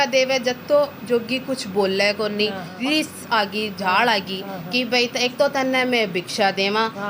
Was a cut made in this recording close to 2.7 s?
yes; 1 cut; at 2.7 s

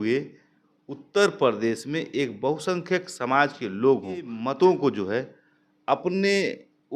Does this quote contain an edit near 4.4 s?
yes; 1 cut; at 4.4 s

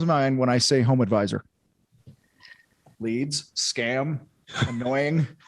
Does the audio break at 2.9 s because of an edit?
yes; 1 cut; at 2.9 s

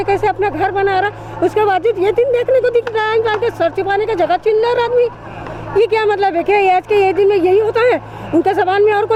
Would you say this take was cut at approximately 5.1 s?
no; 0 cuts

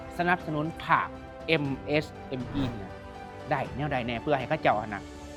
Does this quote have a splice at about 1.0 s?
no; 0 cuts

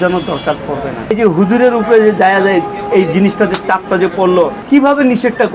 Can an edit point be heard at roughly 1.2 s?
yes; 2 cuts; at 1.2 s, 4.6 s

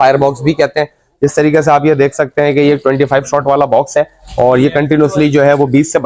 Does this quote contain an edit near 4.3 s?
no; 0 cuts

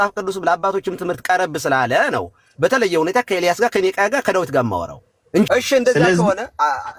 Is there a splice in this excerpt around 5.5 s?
yes; 1 cut; at 5.5 s

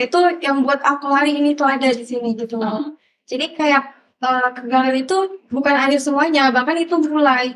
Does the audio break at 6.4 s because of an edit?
no; 0 cuts

